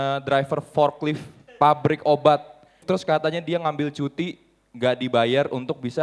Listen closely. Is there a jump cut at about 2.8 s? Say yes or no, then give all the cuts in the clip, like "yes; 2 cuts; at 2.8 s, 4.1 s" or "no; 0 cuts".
yes; 1 cut; at 2.8 s